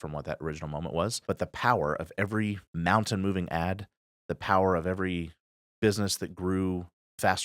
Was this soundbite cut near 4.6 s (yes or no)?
no